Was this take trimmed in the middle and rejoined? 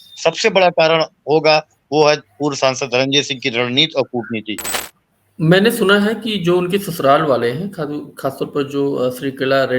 no; 0 cuts

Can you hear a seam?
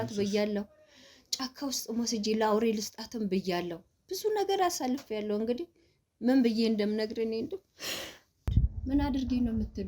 yes; 1 cut; at 8.5 s

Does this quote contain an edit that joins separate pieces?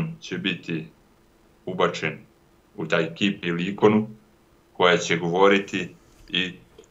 no; 0 cuts

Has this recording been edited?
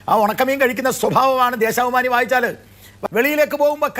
yes; 1 cut; at 3.0 s

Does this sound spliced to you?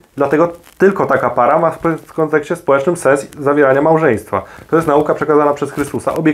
yes; 1 cut; at 4.5 s

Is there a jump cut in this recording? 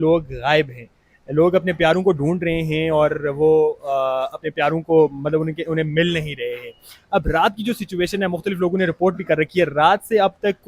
no; 0 cuts

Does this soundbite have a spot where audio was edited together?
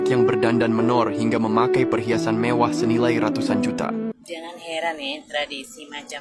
yes; 1 cut; at 4.1 s

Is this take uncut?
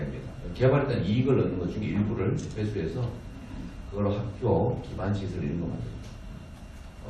no; 1 cut; at 4.0 s

